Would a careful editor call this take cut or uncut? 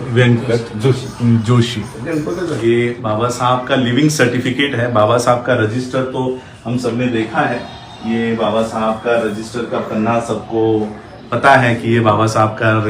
cut